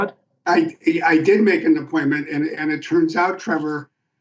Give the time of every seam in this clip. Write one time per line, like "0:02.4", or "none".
none